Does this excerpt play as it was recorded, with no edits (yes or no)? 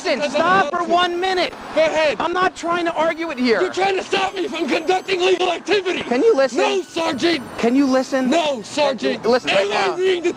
no